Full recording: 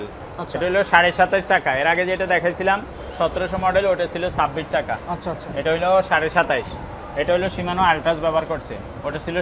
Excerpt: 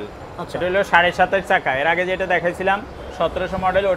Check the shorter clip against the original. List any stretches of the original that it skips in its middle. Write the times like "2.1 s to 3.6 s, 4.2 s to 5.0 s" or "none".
none